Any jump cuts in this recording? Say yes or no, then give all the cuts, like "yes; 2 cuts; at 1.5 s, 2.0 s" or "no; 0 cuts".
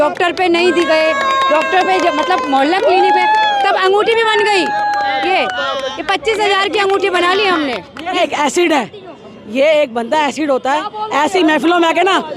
yes; 1 cut; at 8.1 s